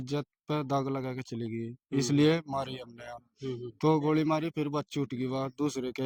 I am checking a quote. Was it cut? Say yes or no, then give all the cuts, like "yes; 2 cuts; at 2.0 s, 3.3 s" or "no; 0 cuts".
no; 0 cuts